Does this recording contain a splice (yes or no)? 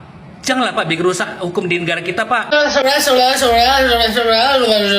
yes